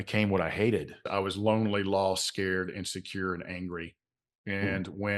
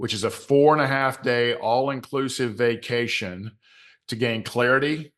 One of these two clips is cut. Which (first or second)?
first